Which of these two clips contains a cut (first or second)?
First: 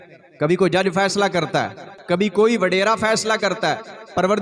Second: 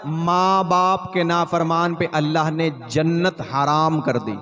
first